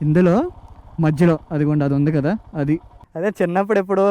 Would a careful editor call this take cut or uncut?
cut